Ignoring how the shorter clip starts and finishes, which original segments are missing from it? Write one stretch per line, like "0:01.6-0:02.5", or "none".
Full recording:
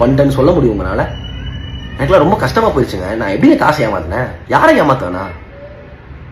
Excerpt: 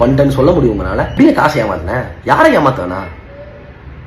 0:01.1-0:03.4